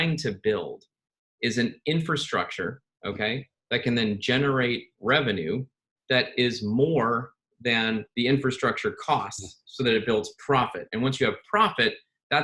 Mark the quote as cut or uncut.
uncut